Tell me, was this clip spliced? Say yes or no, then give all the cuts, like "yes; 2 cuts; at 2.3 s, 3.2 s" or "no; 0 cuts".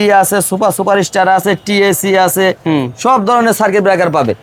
no; 0 cuts